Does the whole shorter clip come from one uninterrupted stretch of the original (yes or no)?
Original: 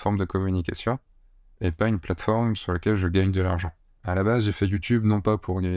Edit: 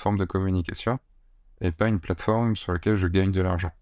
yes